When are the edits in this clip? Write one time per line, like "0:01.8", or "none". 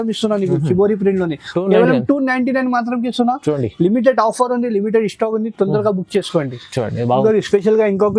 none